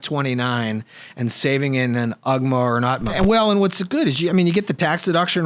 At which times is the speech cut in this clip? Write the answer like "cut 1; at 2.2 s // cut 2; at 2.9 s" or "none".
cut 1; at 3.1 s